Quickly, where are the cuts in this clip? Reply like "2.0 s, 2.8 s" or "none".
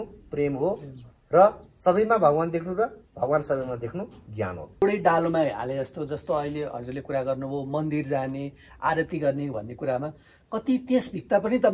4.8 s